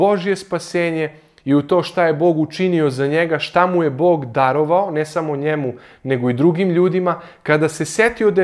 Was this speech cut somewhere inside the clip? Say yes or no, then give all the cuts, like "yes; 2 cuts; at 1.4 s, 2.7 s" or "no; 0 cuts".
no; 0 cuts